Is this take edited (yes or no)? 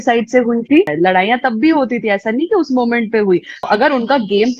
yes